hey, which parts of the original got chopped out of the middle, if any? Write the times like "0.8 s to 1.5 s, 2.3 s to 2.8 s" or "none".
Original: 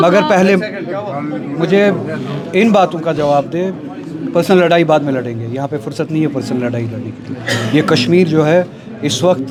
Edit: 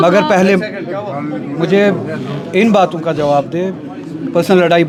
none